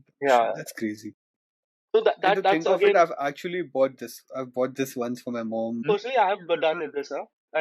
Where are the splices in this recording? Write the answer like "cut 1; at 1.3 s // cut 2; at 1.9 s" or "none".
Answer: cut 1; at 5.8 s